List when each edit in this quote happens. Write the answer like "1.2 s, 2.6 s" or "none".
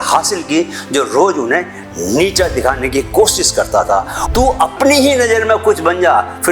4.2 s